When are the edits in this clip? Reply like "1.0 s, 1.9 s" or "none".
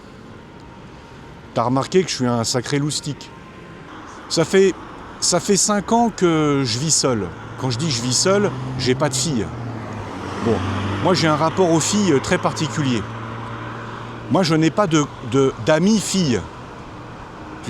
3.9 s

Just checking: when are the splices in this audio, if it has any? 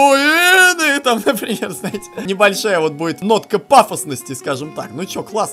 2.2 s, 3.2 s

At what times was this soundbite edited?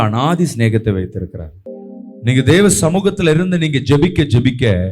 1.5 s

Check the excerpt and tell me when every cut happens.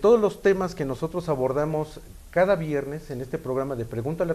none

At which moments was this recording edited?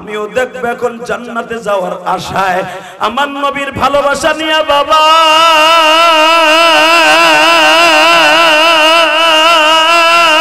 none

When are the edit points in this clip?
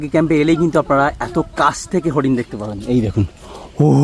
none

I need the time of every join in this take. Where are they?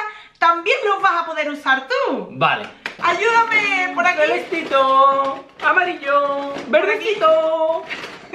2.9 s

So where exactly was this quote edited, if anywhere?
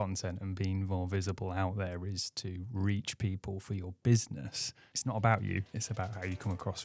4.8 s, 5.7 s

